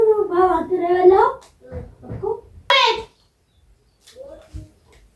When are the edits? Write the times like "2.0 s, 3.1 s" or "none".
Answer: 2.7 s